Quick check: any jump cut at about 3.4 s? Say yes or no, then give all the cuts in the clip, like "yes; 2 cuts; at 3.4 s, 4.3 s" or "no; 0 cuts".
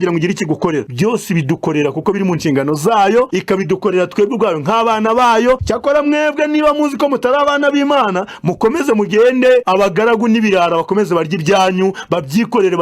yes; 4 cuts; at 0.9 s, 3.4 s, 5.7 s, 9.7 s